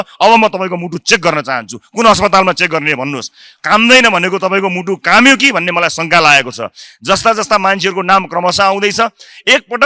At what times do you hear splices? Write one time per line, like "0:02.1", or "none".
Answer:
none